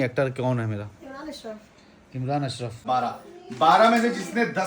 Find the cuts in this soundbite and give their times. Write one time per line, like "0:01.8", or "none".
0:02.8